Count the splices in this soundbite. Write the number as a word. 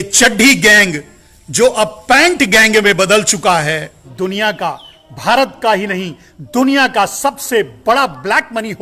one